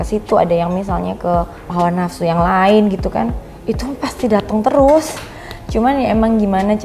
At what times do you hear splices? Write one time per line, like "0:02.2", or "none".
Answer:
0:01.6